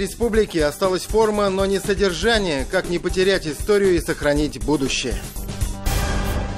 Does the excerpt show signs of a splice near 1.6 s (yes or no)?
no